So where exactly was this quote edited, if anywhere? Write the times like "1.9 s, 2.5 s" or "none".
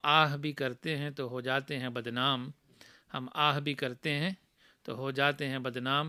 none